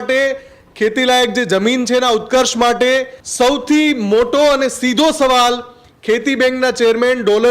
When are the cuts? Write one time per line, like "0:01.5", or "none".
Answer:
0:03.2